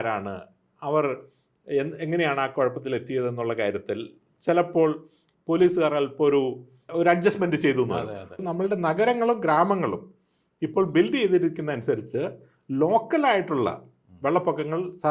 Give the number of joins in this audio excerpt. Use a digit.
1